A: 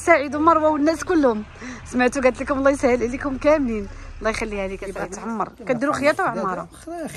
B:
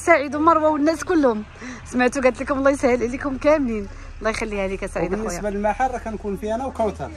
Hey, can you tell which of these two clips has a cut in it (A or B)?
A